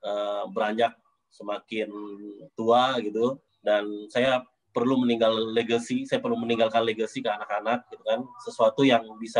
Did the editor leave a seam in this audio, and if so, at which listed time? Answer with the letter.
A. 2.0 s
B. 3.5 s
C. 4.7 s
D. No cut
B